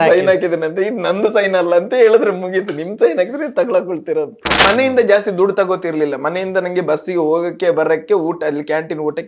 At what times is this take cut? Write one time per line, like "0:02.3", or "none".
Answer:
0:04.6